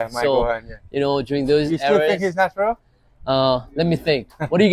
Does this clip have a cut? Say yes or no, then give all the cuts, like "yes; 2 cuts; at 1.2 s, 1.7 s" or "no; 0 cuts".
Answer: no; 0 cuts